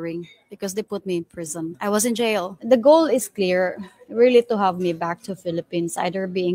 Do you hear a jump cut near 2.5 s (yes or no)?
yes